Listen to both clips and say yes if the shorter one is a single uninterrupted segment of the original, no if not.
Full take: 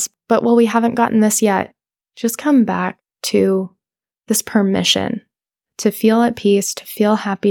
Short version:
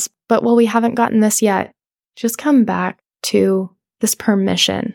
no